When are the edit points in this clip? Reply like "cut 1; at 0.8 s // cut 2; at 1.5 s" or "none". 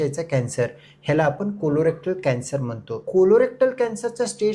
cut 1; at 3.0 s